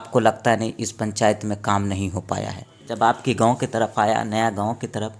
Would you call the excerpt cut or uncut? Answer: cut